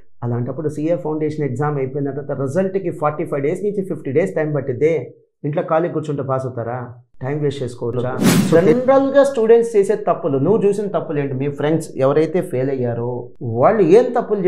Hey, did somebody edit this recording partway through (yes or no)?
yes